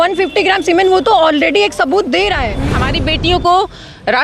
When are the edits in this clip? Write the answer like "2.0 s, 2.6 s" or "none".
2.8 s